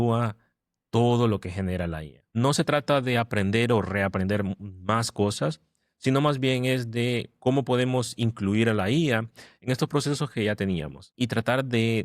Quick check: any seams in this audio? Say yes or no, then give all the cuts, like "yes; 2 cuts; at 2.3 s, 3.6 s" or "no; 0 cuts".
yes; 2 cuts; at 2.3 s, 11.0 s